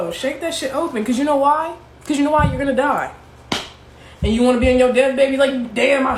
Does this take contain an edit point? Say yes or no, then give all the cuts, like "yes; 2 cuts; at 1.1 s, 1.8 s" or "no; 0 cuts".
no; 0 cuts